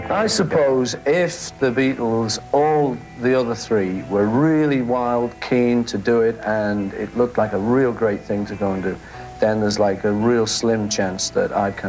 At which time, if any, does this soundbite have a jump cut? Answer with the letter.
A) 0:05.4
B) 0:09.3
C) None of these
C